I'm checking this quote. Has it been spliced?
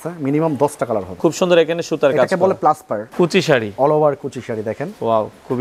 yes; 2 cuts; at 1.1 s, 3.0 s

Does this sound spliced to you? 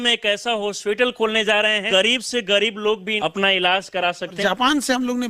yes; 3 cuts; at 1.8 s, 3.1 s, 4.4 s

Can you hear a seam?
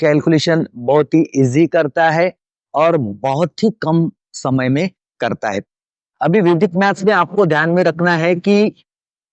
yes; 1 cut; at 5.8 s

